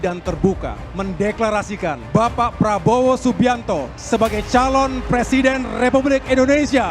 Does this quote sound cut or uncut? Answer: uncut